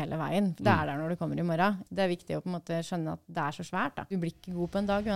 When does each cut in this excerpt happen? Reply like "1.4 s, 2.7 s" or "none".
1.8 s, 4.1 s